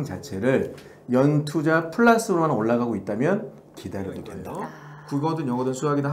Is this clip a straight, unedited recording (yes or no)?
no